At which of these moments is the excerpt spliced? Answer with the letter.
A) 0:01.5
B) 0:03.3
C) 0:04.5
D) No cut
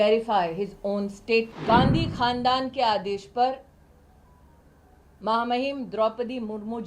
A